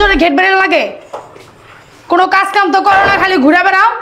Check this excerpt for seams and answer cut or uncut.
uncut